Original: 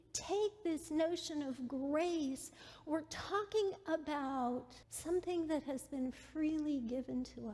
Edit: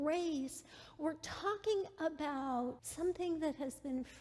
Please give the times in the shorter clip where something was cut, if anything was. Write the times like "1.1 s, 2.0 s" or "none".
2.8 s